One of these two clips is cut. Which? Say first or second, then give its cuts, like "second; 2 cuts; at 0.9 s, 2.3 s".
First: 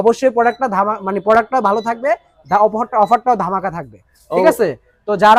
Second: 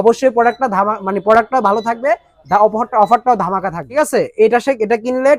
second; 1 cut; at 3.9 s